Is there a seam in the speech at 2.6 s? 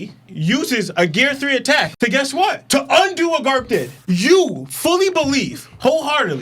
no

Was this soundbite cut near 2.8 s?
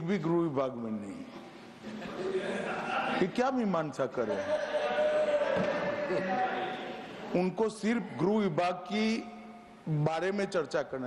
no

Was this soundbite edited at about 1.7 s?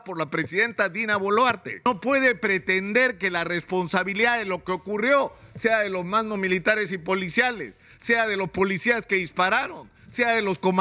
yes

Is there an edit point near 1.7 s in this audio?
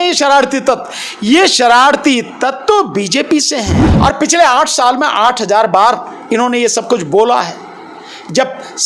no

